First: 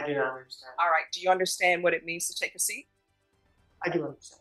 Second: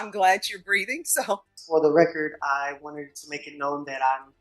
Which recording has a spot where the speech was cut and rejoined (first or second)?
second